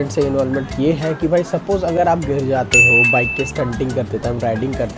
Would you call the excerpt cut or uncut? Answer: uncut